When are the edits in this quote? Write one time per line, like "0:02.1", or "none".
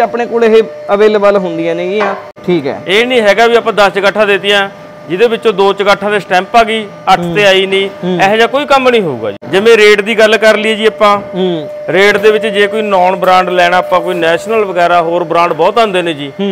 0:02.3
0:09.3